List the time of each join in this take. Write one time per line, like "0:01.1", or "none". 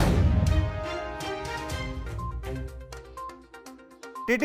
none